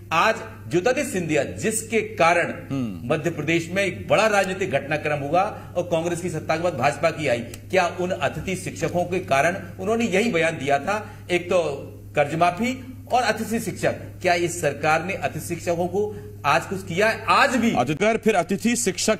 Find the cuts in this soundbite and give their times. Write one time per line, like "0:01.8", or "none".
0:18.0